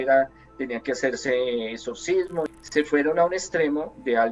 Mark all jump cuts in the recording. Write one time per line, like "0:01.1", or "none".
0:02.5